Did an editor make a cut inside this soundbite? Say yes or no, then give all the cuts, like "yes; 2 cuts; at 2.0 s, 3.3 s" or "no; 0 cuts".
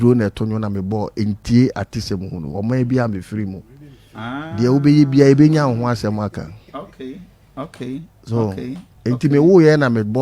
no; 0 cuts